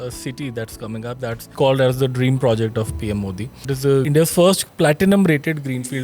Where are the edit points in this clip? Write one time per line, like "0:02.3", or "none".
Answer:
0:01.4
0:04.0

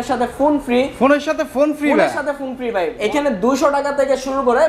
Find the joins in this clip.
0:02.9

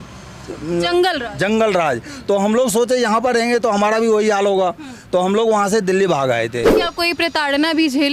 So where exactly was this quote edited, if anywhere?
0:06.7

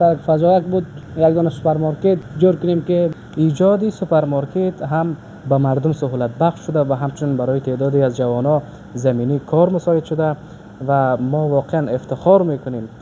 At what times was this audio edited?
0:01.0
0:02.3
0:03.1

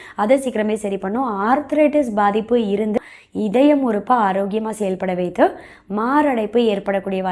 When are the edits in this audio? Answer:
0:02.9

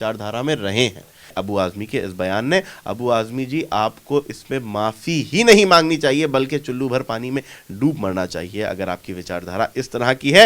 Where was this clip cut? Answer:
0:01.3

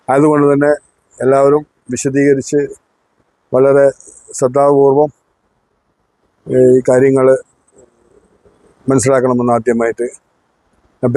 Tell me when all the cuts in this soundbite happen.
none

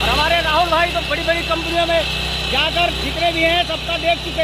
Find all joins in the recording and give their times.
none

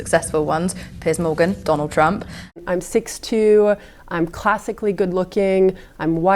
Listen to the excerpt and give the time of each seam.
0:02.6

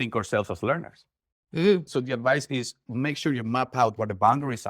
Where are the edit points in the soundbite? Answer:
0:01.9

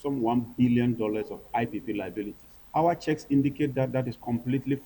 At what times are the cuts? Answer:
none

